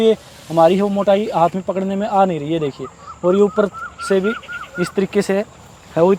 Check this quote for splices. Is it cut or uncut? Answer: uncut